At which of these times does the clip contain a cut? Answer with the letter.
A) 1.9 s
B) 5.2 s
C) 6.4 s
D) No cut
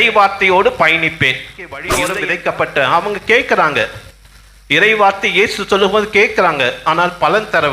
A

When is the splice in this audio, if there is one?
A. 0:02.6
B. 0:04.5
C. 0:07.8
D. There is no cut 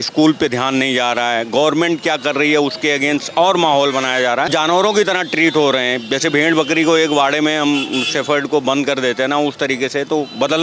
B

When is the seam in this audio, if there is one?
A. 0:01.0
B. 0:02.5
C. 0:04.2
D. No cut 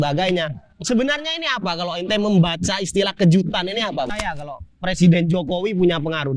C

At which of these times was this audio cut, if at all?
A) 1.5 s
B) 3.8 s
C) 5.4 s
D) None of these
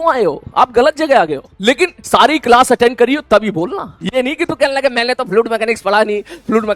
A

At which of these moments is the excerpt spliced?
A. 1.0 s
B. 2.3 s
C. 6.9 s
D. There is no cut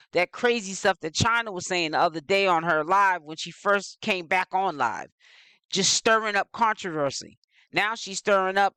D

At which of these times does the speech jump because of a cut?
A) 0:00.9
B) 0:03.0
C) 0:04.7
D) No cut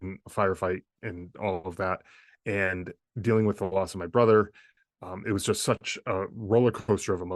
A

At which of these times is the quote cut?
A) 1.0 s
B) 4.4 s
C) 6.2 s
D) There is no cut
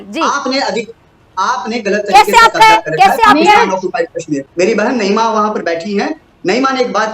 B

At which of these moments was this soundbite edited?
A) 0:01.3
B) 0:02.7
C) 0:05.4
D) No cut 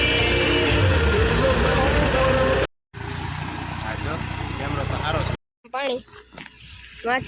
C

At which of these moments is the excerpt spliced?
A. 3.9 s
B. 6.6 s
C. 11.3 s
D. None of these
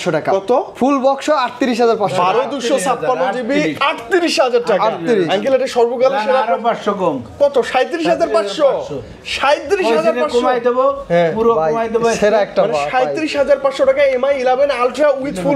D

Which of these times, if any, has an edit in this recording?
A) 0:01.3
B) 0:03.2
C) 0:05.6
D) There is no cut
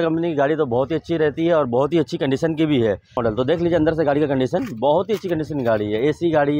B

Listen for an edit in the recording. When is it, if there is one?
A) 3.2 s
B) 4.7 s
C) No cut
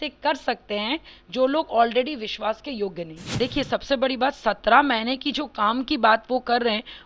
A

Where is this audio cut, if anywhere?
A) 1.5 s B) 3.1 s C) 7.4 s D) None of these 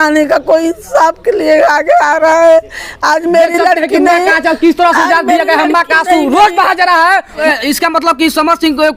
C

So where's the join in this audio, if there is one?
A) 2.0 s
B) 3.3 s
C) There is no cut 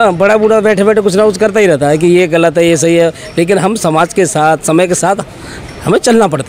C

